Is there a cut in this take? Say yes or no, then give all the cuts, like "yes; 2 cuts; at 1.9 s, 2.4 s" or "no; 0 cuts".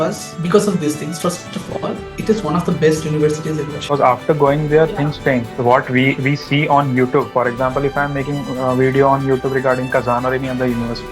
yes; 1 cut; at 3.8 s